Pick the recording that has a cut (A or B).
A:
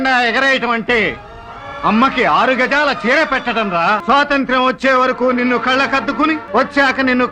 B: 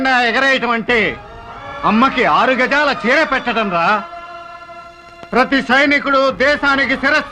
A